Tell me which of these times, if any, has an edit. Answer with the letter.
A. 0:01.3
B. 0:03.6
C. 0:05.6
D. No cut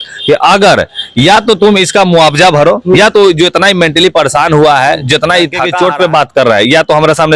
C